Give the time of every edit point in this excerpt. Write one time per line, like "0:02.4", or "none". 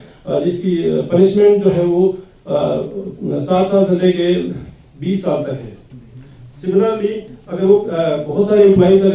none

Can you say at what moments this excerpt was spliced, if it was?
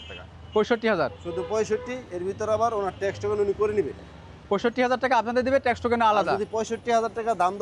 none

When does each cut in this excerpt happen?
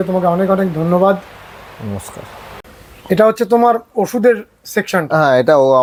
none

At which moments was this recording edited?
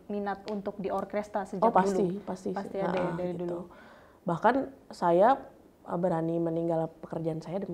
none

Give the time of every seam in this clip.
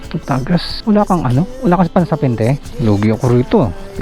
0:02.7

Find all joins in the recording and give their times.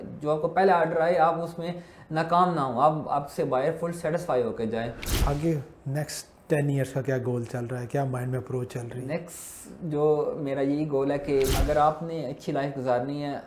0:05.1
0:11.5

